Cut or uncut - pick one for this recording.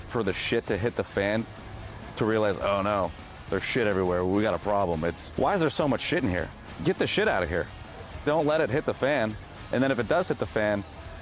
cut